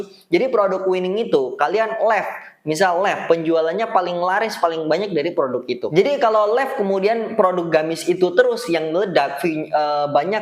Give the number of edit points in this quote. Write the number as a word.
one